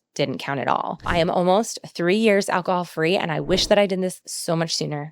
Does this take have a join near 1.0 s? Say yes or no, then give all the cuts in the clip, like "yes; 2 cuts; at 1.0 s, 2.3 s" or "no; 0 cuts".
yes; 1 cut; at 1.0 s